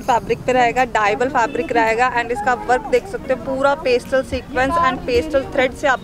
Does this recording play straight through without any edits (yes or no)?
yes